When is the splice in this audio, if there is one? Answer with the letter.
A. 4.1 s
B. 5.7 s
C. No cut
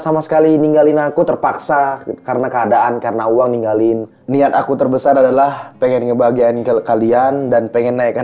A